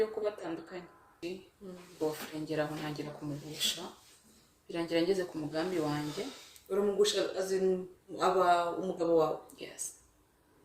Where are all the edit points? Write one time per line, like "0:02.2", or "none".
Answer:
0:01.1